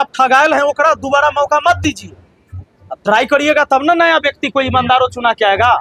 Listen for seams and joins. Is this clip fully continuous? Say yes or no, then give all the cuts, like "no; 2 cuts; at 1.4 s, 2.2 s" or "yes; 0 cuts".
yes; 0 cuts